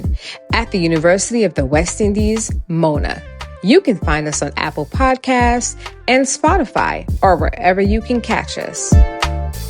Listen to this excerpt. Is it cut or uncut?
cut